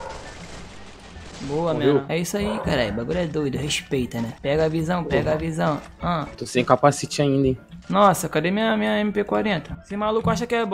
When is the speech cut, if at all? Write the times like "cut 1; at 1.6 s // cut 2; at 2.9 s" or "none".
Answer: cut 1; at 2.1 s // cut 2; at 6.4 s